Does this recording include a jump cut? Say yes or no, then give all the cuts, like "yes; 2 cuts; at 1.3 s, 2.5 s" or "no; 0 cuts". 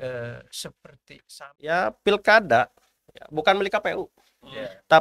yes; 1 cut; at 1.2 s